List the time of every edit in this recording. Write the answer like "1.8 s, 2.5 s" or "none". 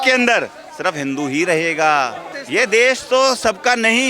2.3 s